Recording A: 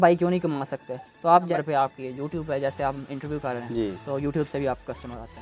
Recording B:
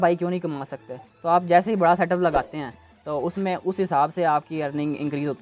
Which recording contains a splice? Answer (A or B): A